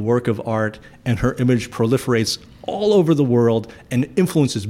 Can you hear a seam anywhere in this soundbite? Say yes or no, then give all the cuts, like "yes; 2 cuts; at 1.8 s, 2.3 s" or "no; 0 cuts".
no; 0 cuts